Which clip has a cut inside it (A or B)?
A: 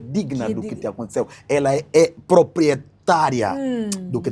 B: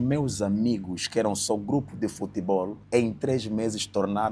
B